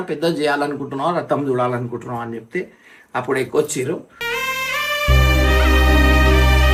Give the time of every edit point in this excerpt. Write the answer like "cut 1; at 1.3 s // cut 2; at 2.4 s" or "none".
none

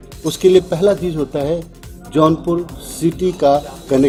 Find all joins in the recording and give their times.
none

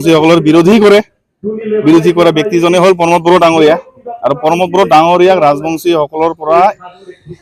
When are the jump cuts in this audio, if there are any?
none

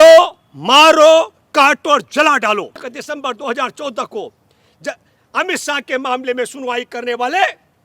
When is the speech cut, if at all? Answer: cut 1; at 2.9 s

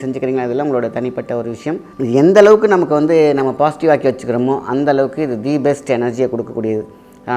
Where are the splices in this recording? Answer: cut 1; at 1.9 s

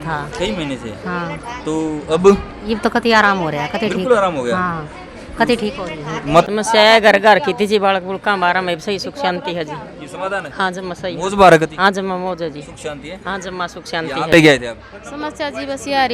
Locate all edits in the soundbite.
cut 1; at 6.4 s // cut 2; at 14.3 s

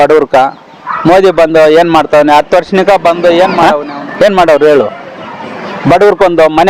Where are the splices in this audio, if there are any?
cut 1; at 3.5 s

